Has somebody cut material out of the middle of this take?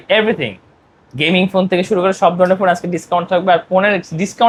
no; 0 cuts

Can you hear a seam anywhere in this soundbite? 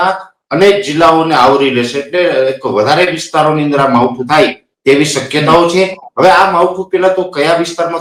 no; 0 cuts

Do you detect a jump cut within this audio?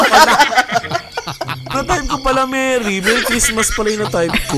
yes; 1 cut; at 1.9 s

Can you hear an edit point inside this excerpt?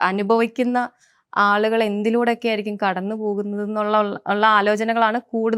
no; 0 cuts

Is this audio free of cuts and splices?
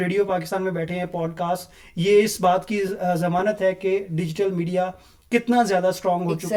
yes; 0 cuts

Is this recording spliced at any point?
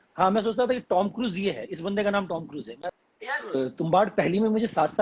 yes; 1 cut; at 2.9 s

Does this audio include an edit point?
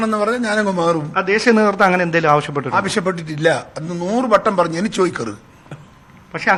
no; 0 cuts

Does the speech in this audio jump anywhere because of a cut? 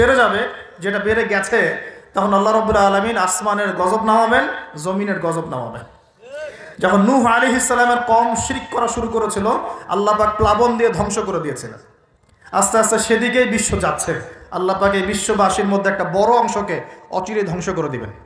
no; 0 cuts

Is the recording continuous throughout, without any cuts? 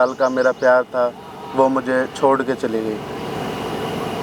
yes; 0 cuts

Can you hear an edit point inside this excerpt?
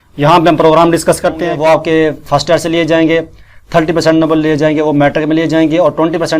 yes; 1 cut; at 1.5 s

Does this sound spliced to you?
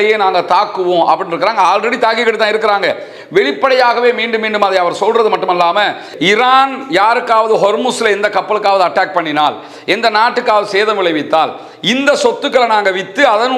yes; 1 cut; at 6.1 s

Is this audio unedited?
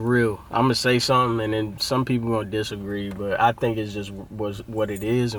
yes; 0 cuts

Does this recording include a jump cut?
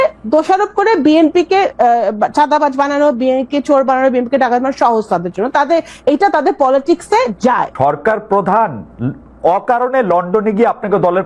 yes; 1 cut; at 7.7 s

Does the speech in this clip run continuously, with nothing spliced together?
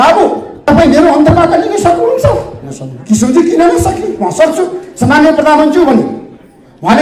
yes; 0 cuts

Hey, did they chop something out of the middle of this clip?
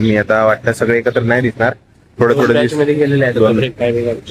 no; 0 cuts

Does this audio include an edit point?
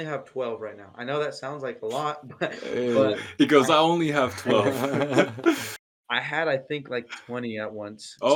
no; 0 cuts

